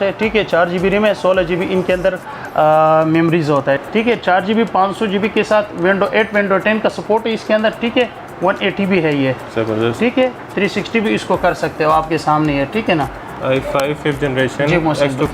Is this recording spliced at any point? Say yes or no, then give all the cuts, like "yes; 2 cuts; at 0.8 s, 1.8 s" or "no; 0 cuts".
yes; 2 cuts; at 3.8 s, 13.3 s